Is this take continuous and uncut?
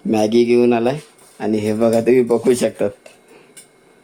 yes; 0 cuts

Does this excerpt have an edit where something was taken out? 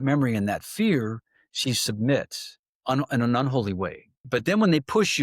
yes; 1 cut; at 4.2 s

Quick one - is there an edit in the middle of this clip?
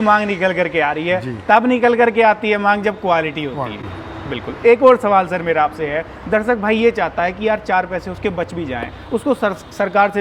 no; 0 cuts

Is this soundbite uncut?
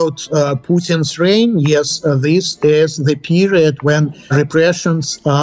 yes; 0 cuts

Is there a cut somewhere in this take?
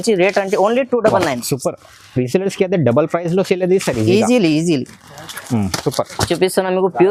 no; 0 cuts

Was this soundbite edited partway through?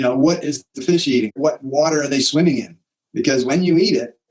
yes; 1 cut; at 1.3 s

